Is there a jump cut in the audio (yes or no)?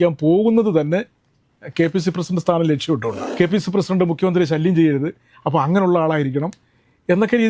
yes